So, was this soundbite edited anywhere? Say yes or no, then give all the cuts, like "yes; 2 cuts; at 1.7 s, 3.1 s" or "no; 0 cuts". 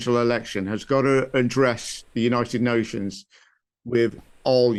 no; 0 cuts